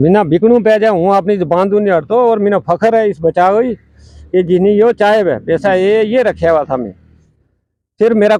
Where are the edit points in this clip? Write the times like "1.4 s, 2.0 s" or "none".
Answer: none